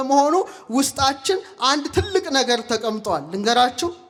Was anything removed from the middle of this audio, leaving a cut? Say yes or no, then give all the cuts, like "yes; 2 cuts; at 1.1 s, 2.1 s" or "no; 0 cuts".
no; 0 cuts